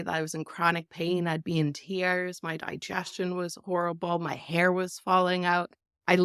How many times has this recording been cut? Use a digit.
0